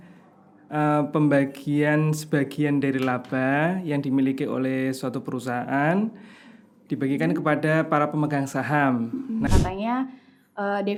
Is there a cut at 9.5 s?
yes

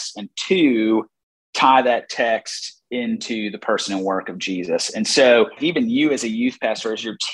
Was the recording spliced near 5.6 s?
yes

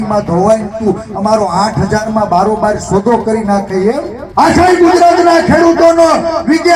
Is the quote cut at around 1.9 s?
no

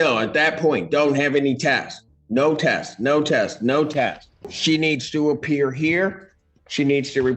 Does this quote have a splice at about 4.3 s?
yes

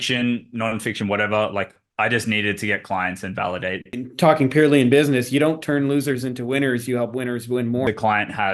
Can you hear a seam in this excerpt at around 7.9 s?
yes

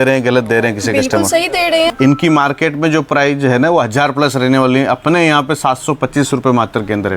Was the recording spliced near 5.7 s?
no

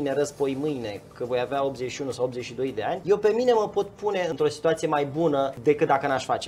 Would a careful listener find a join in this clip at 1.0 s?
no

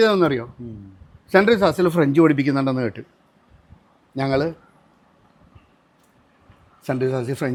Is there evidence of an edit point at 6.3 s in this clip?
no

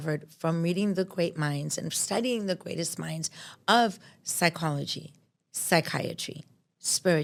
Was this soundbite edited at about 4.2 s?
no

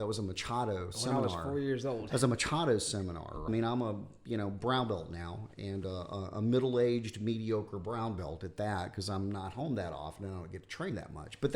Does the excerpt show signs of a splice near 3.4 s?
yes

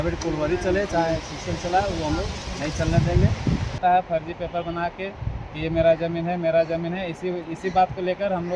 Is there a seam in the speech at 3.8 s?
yes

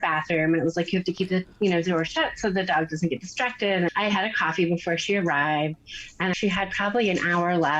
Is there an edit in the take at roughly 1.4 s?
no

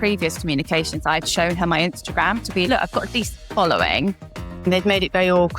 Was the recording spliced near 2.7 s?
yes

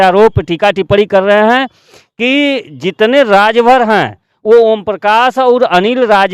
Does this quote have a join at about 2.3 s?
no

